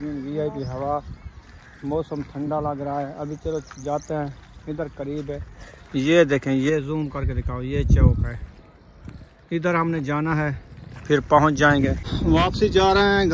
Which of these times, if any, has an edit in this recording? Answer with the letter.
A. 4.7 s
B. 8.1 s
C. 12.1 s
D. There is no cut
C